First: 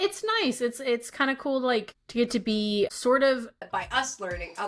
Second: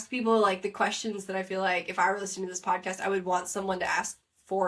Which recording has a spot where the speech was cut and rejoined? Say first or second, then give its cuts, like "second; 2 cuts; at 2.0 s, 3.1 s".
first; 3 cuts; at 2.0 s, 2.9 s, 3.6 s